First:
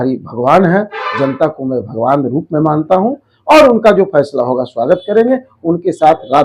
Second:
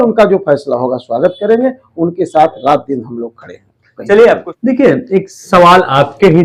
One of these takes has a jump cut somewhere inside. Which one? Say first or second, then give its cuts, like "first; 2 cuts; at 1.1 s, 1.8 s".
second; 1 cut; at 4.5 s